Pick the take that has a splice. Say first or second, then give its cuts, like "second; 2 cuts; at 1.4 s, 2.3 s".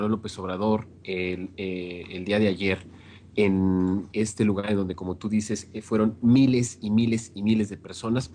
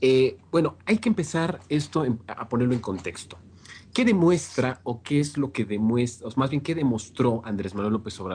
first; 1 cut; at 4.4 s